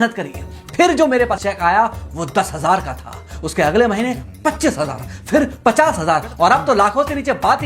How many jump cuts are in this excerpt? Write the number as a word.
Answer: one